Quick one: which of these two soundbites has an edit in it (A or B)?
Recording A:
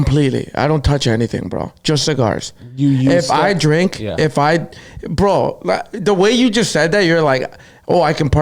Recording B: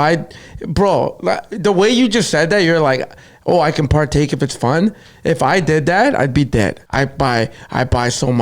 B